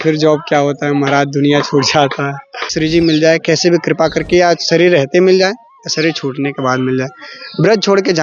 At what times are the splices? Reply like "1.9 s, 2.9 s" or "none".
2.6 s